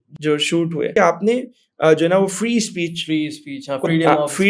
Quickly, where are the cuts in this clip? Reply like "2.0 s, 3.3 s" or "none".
0.9 s